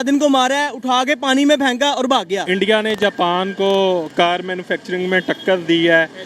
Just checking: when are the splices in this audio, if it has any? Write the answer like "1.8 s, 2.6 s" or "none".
2.4 s